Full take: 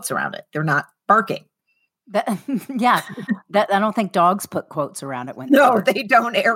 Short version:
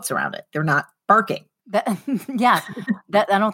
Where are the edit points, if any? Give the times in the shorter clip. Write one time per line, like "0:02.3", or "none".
0:01.5